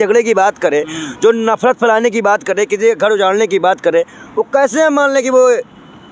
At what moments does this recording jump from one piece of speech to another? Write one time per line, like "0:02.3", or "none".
none